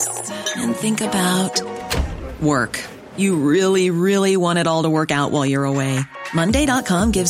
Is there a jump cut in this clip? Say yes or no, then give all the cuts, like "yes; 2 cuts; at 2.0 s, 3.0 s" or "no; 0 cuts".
no; 0 cuts